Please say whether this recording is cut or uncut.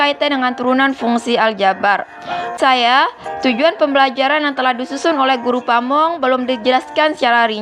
cut